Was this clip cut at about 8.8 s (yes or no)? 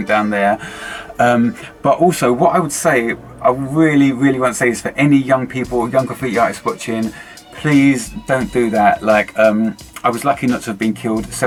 no